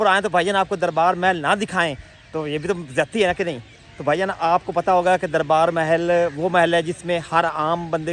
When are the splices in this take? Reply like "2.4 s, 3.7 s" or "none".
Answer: none